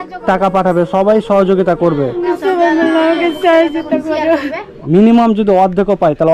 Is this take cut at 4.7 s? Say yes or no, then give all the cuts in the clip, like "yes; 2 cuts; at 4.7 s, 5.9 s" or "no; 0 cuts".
yes; 2 cuts; at 2.3 s, 4.7 s